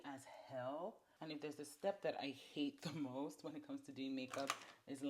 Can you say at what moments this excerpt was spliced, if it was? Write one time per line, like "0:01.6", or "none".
0:01.1